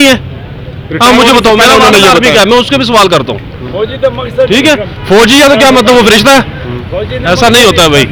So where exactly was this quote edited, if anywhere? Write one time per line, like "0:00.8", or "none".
none

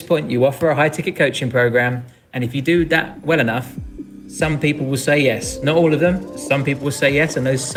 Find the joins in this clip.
none

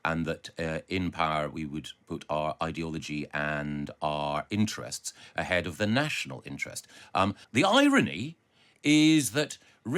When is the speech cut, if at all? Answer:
0:07.4

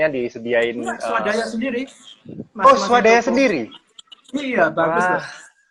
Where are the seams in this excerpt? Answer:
none

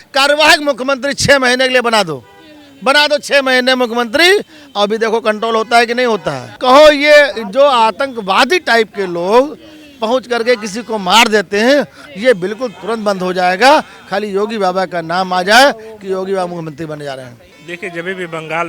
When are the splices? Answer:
none

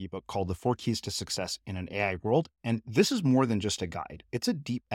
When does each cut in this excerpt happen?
none

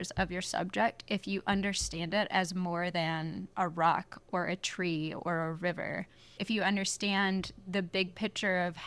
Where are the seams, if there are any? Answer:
0:06.4

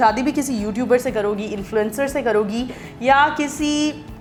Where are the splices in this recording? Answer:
none

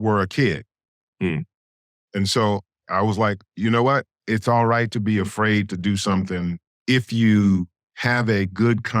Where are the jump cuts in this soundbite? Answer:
0:06.7

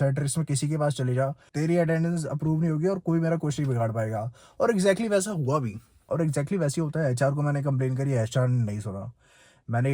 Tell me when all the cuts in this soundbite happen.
none

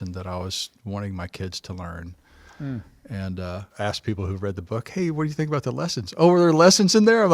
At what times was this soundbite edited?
0:03.7

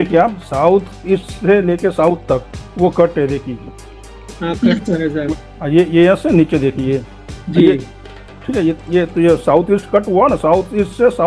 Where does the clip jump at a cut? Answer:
0:02.6
0:05.3

